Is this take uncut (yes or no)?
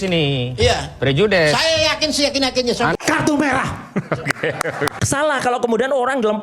no